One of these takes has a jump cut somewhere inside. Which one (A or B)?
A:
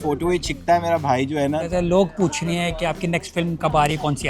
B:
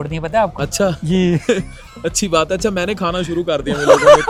A